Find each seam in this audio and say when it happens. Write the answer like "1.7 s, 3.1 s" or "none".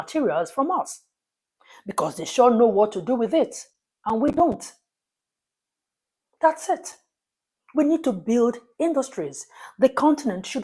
none